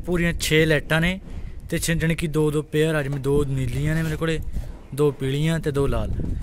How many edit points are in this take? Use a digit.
0